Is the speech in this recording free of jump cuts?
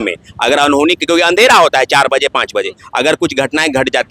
yes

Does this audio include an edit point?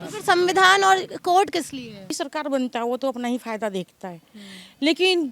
yes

